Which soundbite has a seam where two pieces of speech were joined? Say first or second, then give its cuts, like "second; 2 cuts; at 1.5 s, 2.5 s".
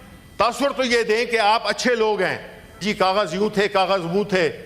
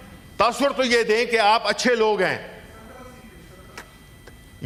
first; 1 cut; at 2.8 s